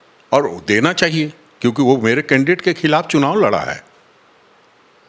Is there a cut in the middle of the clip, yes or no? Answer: no